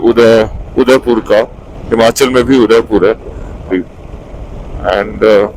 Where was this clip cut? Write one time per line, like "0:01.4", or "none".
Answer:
0:03.7